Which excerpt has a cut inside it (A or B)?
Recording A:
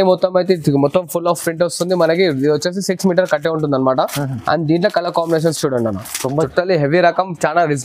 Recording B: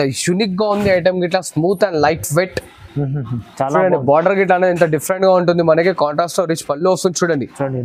A